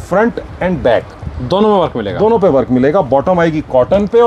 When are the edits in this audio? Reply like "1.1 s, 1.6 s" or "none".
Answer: none